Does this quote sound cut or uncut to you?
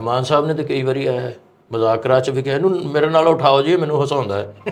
uncut